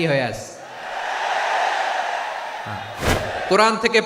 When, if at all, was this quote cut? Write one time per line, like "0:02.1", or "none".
0:03.0